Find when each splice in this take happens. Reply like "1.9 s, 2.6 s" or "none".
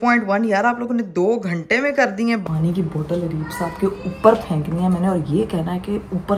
2.4 s